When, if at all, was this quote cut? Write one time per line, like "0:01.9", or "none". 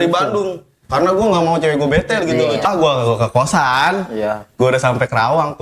0:02.7